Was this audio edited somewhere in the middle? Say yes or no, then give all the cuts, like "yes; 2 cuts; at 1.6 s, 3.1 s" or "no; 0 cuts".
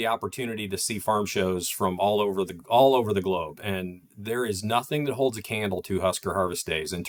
no; 0 cuts